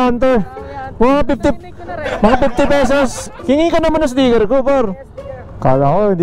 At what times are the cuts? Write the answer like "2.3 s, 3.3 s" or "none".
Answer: 3.3 s